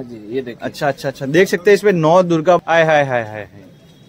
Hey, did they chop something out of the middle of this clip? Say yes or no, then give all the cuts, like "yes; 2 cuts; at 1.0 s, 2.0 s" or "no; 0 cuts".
yes; 1 cut; at 2.6 s